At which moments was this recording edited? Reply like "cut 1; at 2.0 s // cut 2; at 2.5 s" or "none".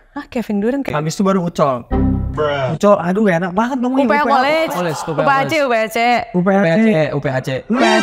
cut 1; at 0.9 s